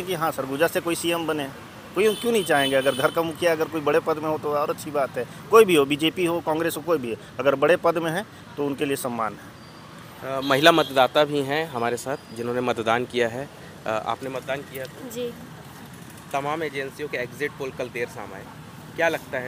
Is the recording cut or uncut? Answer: uncut